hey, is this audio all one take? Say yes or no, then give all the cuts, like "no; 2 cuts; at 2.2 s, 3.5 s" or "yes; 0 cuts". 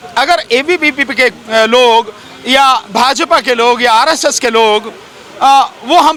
yes; 0 cuts